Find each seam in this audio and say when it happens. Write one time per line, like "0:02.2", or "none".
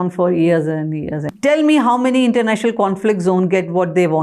0:01.2